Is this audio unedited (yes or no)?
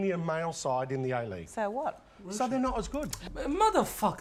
yes